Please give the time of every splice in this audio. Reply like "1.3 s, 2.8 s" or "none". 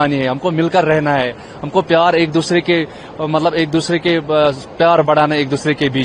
none